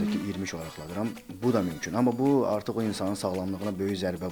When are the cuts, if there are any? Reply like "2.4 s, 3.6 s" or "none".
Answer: none